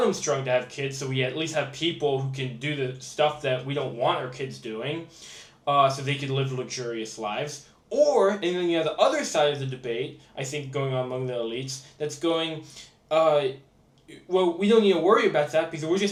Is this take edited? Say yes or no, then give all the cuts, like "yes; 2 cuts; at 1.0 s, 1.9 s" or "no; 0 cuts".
no; 0 cuts